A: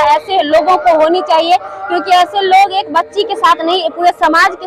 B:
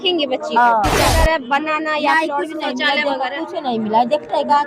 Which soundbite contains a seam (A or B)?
B